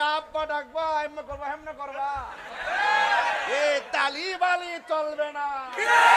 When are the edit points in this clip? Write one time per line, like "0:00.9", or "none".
none